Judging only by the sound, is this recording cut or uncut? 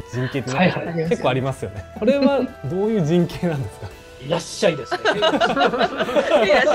cut